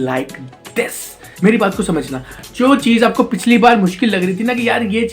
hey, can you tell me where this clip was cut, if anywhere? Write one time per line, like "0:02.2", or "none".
0:01.3